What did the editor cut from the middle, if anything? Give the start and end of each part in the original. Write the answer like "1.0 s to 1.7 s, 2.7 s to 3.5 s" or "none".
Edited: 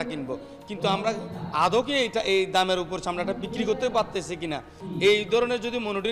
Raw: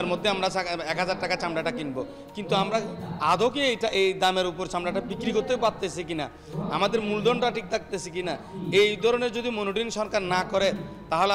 6.4 s to 8.5 s